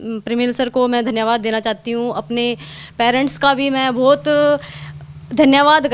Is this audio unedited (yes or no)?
yes